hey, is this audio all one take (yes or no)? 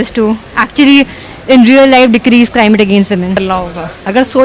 no